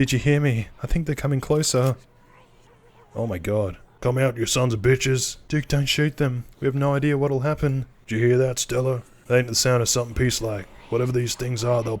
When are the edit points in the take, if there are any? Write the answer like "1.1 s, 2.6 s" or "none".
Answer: 3.9 s, 5.3 s, 7.9 s, 9.1 s